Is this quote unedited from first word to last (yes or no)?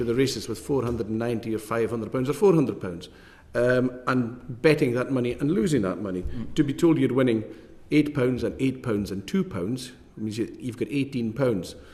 yes